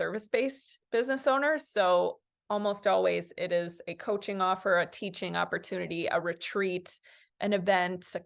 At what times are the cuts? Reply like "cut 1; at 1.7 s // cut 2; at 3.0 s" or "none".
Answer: none